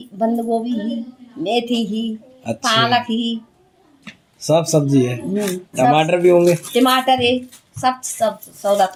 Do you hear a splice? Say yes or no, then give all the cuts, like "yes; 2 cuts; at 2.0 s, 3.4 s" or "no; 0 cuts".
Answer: no; 0 cuts